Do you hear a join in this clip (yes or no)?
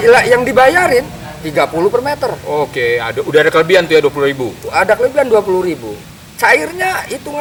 no